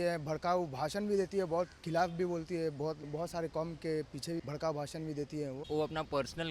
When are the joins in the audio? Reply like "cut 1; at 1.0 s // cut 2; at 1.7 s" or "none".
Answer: cut 1; at 3.1 s // cut 2; at 4.4 s // cut 3; at 5.6 s